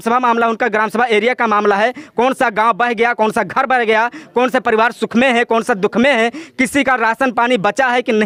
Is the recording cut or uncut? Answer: uncut